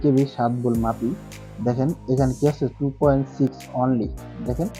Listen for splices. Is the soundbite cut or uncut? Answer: uncut